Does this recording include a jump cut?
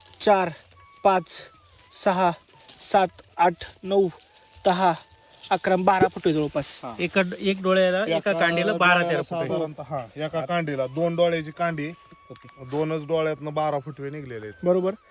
no; 0 cuts

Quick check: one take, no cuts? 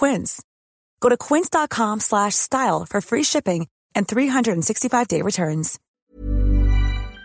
no; 1 cut; at 6.1 s

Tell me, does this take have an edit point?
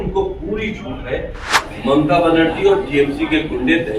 yes; 1 cut; at 1.6 s

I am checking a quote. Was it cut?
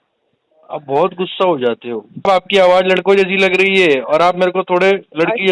yes; 1 cut; at 2.3 s

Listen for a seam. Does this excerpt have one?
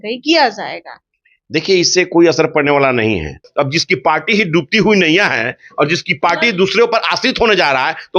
yes; 1 cut; at 3.5 s

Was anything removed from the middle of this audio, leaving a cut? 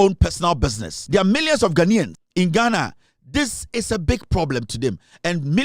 yes; 2 cuts; at 0.9 s, 2.2 s

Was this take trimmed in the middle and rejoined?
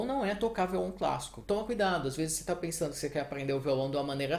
yes; 1 cut; at 1.4 s

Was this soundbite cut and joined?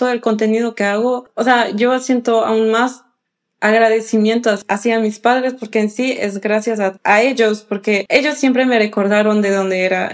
yes; 4 cuts; at 1.3 s, 4.6 s, 7.0 s, 8.0 s

